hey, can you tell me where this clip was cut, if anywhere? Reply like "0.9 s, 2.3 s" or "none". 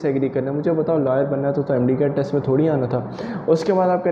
none